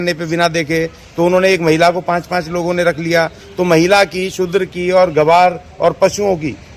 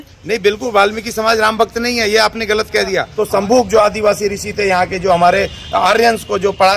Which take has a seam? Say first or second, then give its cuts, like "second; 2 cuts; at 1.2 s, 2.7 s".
second; 1 cut; at 3.1 s